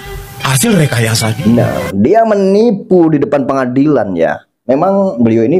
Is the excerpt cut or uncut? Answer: uncut